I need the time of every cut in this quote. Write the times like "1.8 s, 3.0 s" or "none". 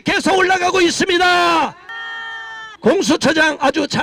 none